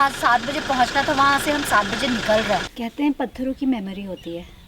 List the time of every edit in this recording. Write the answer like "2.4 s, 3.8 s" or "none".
2.7 s